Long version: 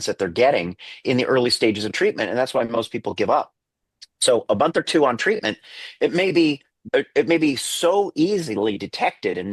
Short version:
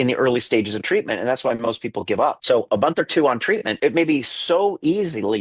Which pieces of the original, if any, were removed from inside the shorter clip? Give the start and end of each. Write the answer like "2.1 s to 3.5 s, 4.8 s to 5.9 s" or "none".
3.5 s to 4.2 s, 5.5 s to 7.1 s